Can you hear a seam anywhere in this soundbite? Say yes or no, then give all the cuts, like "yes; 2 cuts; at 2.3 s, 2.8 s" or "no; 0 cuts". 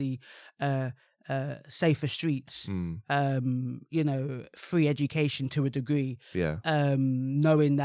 no; 0 cuts